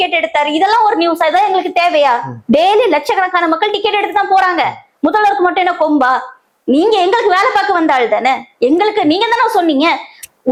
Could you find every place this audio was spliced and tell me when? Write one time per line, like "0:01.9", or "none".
none